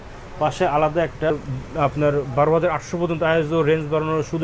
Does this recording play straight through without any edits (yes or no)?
no